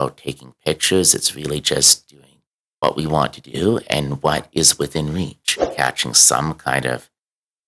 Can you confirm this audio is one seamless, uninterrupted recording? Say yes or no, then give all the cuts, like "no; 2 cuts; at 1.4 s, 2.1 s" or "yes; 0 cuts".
no; 1 cut; at 5.7 s